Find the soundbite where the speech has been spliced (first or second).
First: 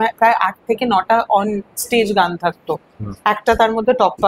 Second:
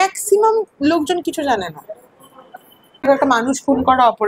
second